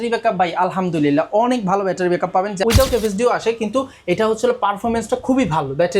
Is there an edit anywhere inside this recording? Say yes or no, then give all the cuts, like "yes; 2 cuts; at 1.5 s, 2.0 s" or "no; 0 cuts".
yes; 1 cut; at 2.6 s